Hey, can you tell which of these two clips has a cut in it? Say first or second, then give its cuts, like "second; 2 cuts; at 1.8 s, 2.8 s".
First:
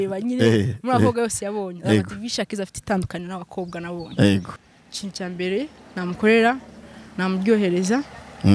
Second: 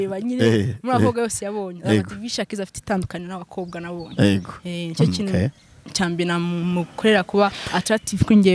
first; 1 cut; at 4.6 s